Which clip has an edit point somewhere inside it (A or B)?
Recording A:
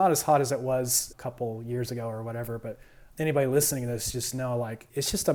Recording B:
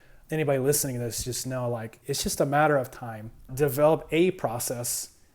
B